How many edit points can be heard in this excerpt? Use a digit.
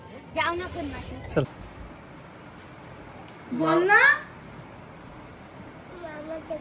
1